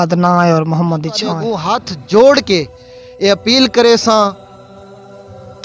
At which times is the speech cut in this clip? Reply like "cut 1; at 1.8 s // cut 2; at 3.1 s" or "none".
cut 1; at 1.5 s